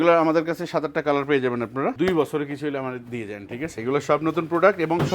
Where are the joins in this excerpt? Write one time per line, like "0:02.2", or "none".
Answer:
0:01.9
0:03.7